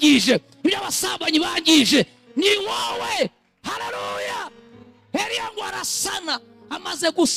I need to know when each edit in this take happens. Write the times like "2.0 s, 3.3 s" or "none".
none